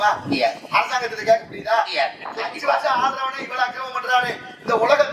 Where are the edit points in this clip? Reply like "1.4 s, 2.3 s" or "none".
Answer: 2.2 s